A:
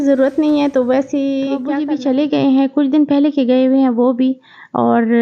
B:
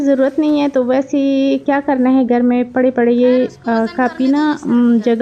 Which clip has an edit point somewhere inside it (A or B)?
A